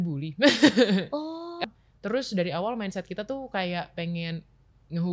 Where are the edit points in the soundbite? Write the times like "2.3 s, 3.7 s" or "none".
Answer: 1.6 s